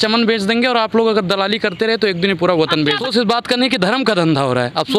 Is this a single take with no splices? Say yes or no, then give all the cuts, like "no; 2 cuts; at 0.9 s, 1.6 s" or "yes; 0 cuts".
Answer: no; 1 cut; at 3.0 s